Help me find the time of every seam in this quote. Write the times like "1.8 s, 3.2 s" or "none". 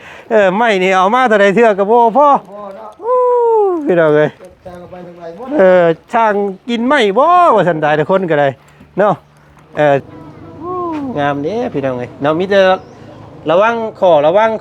10.0 s

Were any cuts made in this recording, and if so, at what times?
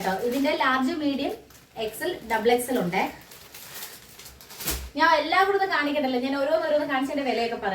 none

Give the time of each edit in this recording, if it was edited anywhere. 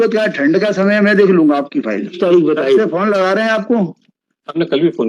2.2 s

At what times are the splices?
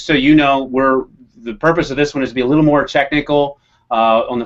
3.1 s

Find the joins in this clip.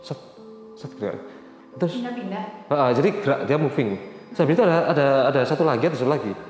none

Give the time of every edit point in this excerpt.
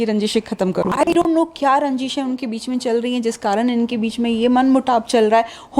1.1 s

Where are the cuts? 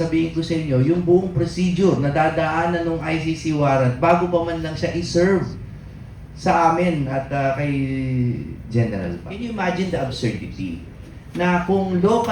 9.3 s

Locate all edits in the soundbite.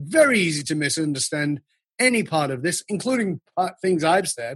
none

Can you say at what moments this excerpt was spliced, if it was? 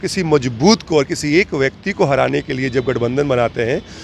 none

